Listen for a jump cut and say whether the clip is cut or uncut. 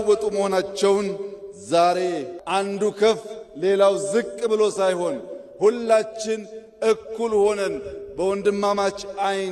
cut